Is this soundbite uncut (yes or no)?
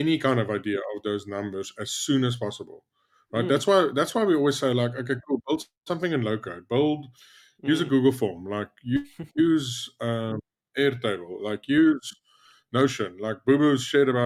yes